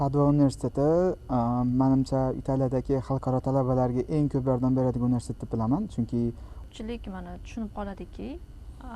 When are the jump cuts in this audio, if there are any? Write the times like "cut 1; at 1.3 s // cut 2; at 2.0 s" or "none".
cut 1; at 6.6 s